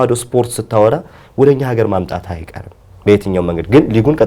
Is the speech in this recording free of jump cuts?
yes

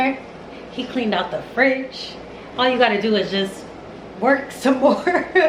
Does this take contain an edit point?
no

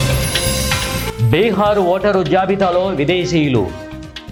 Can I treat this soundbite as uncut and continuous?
yes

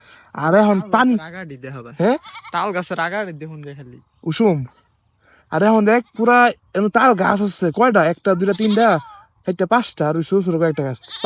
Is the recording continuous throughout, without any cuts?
yes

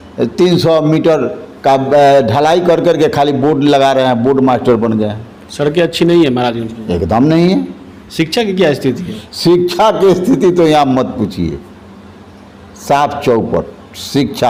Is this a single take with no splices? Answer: yes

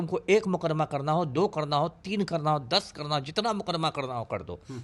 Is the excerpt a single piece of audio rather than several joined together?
yes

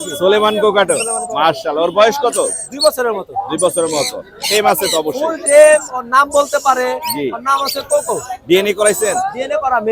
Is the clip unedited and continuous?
yes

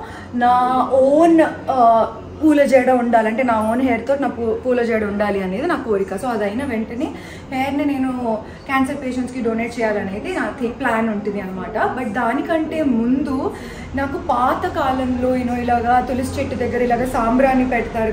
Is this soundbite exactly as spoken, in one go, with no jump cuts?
yes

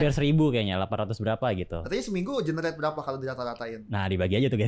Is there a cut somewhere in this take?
no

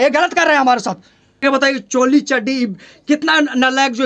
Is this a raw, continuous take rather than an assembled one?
no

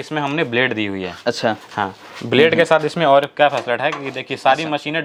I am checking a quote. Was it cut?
no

